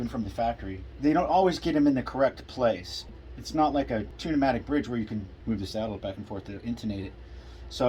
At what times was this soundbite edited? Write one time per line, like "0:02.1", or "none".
0:04.1
0:05.3